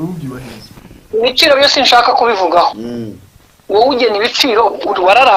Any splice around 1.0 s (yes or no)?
no